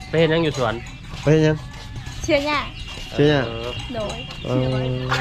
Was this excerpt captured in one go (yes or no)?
yes